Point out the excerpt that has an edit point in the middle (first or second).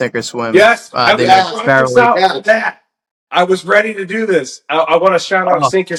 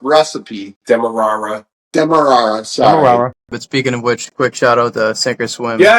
second